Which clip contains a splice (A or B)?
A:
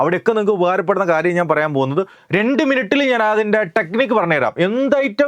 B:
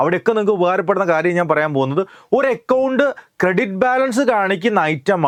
A